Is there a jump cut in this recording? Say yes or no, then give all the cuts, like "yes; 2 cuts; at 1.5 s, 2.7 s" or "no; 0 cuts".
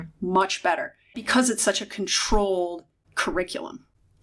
yes; 1 cut; at 1.2 s